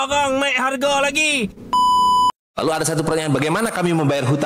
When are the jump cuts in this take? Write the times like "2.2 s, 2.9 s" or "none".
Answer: 2.3 s